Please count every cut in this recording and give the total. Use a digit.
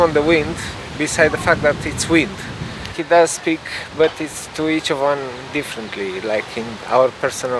1